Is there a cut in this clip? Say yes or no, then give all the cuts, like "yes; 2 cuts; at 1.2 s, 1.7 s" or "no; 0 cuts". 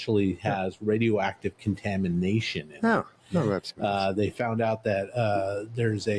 no; 0 cuts